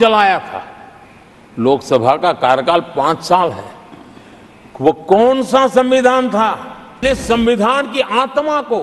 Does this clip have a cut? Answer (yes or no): yes